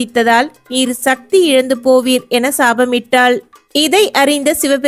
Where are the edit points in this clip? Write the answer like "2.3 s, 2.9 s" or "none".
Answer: none